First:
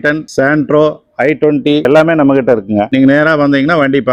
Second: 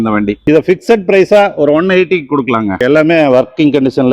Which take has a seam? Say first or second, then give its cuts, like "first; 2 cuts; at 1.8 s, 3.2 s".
second; 1 cut; at 2.7 s